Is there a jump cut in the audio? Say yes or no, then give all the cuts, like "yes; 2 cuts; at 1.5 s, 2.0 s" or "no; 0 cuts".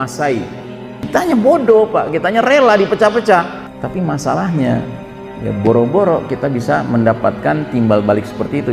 yes; 2 cuts; at 1.1 s, 3.6 s